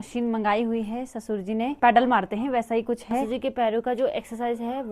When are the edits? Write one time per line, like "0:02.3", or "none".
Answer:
0:01.7
0:03.3